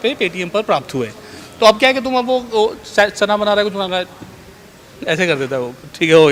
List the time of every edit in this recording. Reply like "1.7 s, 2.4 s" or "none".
none